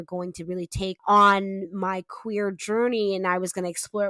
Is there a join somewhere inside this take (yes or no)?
yes